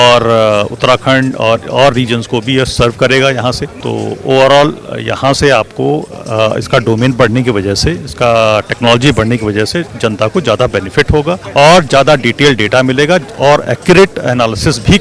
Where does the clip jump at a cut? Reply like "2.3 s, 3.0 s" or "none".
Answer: none